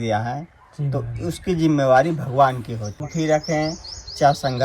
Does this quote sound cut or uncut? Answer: cut